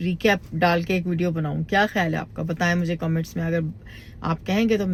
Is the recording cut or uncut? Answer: uncut